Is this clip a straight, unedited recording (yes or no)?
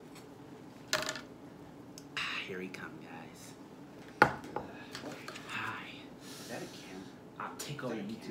yes